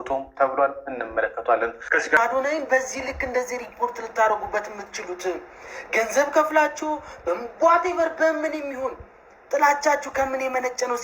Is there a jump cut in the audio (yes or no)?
yes